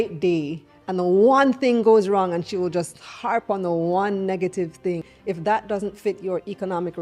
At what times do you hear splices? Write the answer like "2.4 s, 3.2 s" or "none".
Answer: 5.1 s

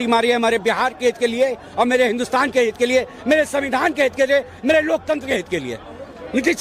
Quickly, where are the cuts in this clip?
none

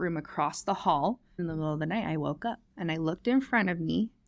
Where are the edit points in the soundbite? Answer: 1.4 s, 2.7 s

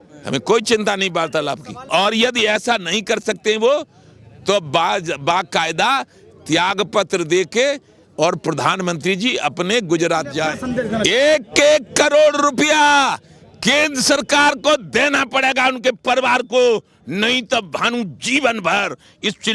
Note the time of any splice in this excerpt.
1.9 s, 10.7 s

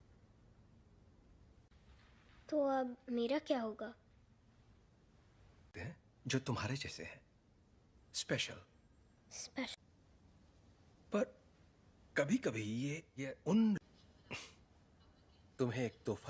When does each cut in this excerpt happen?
none

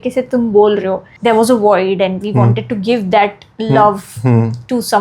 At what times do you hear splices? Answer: 1.1 s

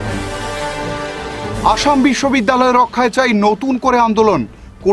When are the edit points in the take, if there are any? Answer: 1.2 s

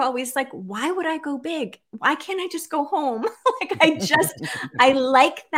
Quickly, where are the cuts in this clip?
none

